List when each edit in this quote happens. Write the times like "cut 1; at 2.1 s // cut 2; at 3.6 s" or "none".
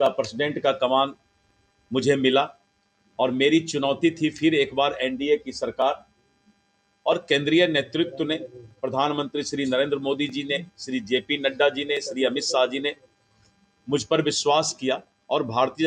none